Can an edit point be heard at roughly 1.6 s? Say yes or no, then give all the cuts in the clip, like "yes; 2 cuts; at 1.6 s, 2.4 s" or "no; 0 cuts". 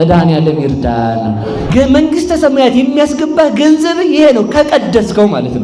yes; 1 cut; at 1.6 s